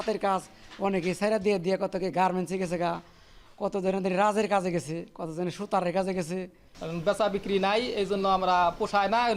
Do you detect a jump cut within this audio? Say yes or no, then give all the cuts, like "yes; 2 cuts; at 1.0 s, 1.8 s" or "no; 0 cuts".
no; 0 cuts